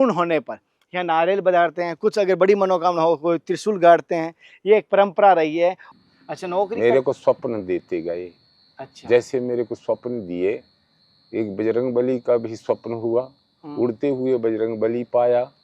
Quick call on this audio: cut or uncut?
cut